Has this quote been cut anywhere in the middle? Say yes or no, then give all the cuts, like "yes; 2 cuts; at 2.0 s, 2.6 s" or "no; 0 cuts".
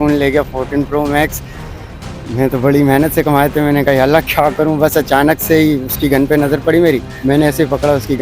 yes; 1 cut; at 7.1 s